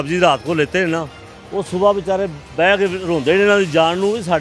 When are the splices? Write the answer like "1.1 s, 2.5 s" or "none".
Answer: none